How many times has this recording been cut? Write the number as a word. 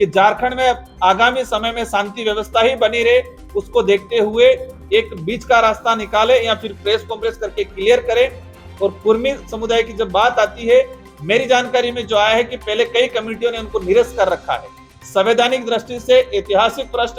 zero